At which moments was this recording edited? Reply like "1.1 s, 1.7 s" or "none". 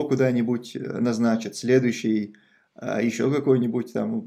none